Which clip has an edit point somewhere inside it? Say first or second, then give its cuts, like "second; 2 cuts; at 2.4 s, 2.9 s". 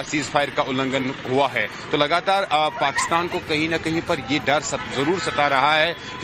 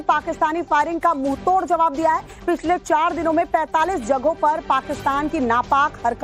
first; 1 cut; at 2.0 s